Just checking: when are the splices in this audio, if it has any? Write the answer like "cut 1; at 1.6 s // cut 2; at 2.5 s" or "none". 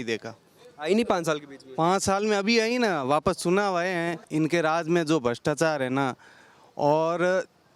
cut 1; at 4.2 s